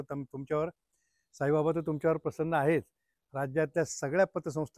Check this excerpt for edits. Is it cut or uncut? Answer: uncut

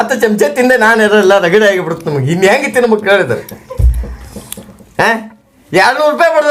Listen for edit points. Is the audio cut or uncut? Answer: uncut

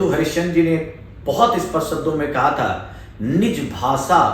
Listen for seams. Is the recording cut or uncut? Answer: uncut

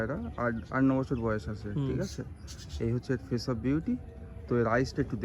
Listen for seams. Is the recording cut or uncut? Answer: uncut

